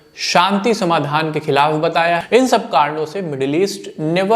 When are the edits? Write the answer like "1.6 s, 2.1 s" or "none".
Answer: 2.2 s